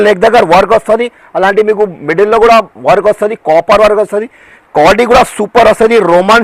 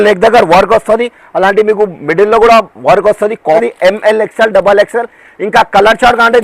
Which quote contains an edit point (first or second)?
second